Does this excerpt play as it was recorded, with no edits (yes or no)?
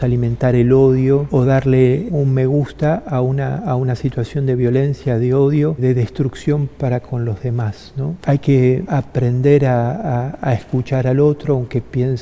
no